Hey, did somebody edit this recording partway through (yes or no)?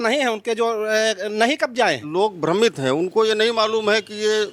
yes